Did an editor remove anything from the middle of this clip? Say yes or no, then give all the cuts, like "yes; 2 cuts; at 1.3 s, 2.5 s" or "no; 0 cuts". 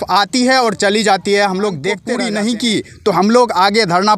yes; 1 cut; at 2.1 s